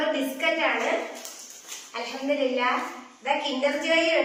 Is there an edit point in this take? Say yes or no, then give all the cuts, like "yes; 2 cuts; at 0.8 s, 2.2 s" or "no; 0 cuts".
no; 0 cuts